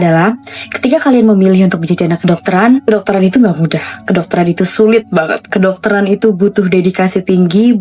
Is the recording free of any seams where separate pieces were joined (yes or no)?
yes